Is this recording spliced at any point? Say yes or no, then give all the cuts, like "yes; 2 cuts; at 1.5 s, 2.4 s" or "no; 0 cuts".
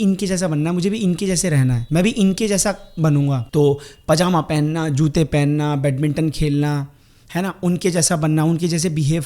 yes; 2 cuts; at 1.8 s, 3.4 s